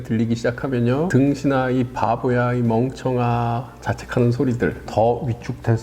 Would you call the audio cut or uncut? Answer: cut